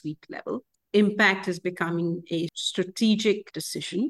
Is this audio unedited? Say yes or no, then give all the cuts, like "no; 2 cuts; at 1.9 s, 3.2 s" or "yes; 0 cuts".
no; 1 cut; at 2.6 s